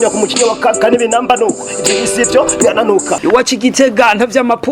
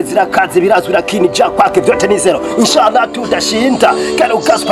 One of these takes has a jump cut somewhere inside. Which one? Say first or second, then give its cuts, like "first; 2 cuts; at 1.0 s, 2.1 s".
first; 1 cut; at 3.1 s